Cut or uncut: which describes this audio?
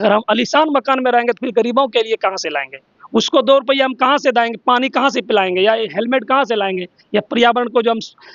uncut